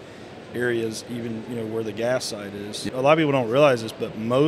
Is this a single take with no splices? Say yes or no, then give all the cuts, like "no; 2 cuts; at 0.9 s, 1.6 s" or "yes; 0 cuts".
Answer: no; 1 cut; at 2.8 s